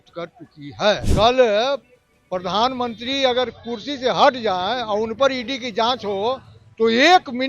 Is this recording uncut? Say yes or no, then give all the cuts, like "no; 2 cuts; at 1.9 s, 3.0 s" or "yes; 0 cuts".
no; 1 cut; at 1.1 s